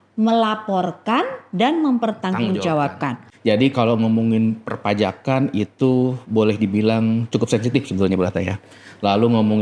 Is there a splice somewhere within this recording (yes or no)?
yes